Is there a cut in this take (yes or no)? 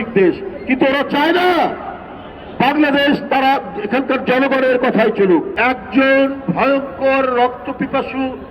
yes